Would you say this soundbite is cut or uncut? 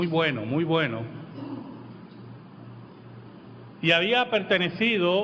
uncut